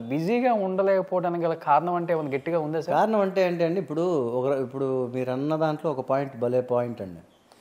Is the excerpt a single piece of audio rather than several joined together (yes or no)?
yes